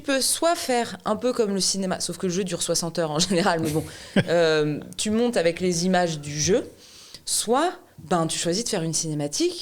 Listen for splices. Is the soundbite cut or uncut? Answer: uncut